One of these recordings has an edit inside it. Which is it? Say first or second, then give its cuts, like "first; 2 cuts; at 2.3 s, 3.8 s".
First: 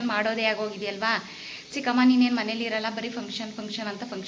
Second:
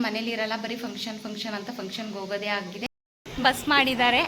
second; 1 cut; at 2.9 s